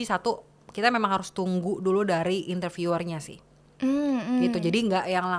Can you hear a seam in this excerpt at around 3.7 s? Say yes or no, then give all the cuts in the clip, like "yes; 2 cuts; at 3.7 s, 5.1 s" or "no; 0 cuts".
no; 0 cuts